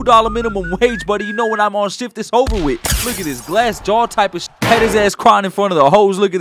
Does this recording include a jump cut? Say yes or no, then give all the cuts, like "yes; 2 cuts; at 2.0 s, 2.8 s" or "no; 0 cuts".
yes; 1 cut; at 4.5 s